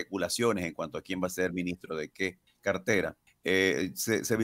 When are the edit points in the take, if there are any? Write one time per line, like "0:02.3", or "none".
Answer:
0:02.5
0:03.3